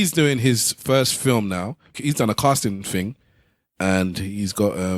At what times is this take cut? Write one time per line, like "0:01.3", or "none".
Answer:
0:02.0